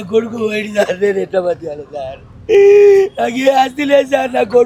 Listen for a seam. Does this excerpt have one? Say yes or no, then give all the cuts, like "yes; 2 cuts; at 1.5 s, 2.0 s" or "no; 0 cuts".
no; 0 cuts